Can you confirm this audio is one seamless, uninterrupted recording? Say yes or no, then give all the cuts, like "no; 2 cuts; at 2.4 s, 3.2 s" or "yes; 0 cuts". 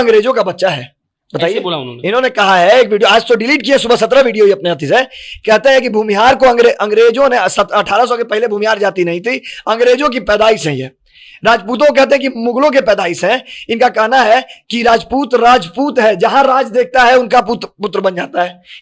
yes; 0 cuts